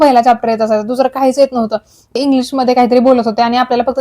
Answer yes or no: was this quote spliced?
yes